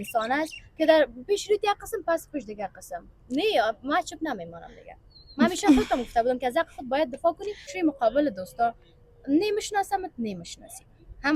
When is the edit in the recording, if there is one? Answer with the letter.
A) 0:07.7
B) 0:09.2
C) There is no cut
A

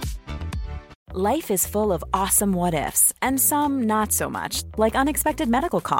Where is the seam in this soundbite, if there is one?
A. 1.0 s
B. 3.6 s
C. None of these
A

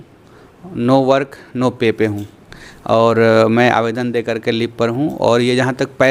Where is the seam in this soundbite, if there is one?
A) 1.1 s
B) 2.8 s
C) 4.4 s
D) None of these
D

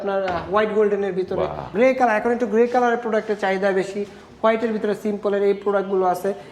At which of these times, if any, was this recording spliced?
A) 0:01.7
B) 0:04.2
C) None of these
A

